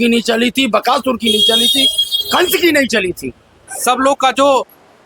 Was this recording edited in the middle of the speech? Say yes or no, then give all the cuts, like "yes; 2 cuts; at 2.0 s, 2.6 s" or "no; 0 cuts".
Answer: yes; 1 cut; at 3.6 s